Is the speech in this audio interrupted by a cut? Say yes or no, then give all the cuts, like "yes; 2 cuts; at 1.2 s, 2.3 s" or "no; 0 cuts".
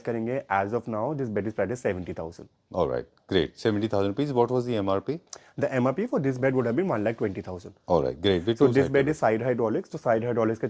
no; 0 cuts